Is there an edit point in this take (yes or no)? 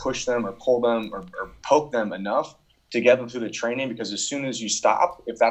no